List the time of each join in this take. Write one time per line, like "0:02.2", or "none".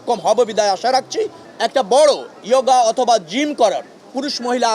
0:01.4